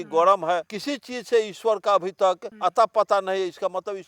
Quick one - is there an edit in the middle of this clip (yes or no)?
no